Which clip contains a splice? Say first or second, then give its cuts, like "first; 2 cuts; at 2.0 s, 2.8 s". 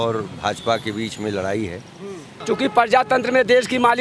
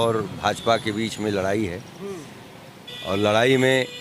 first; 1 cut; at 2.3 s